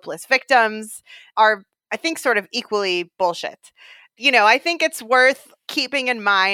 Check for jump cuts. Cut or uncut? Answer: cut